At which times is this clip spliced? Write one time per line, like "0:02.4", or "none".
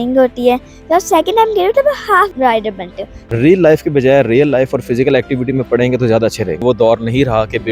0:02.8
0:06.6